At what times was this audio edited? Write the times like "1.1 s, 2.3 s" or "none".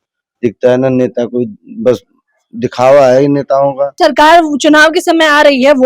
3.9 s